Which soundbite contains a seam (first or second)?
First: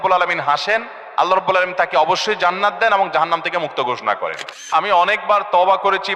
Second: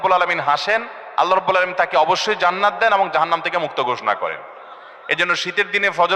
first